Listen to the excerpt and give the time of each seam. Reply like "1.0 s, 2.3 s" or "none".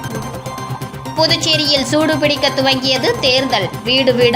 1.1 s